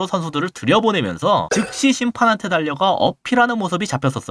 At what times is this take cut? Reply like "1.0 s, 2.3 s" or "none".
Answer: 1.5 s